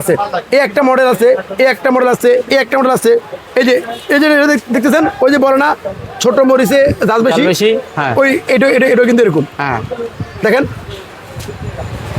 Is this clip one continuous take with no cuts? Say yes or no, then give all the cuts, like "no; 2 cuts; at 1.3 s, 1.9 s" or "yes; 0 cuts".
yes; 0 cuts